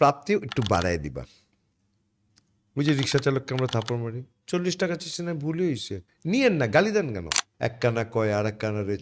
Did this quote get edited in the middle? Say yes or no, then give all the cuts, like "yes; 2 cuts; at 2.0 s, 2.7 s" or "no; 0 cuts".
yes; 1 cut; at 7.4 s